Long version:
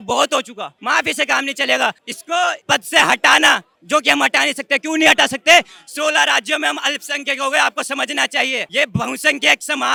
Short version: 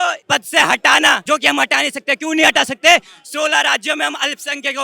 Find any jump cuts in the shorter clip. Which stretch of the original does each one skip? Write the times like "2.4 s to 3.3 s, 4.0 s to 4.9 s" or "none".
3.6 s to 3.8 s

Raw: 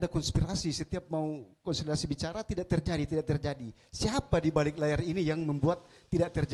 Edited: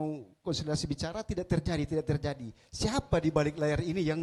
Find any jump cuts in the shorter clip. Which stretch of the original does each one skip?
none

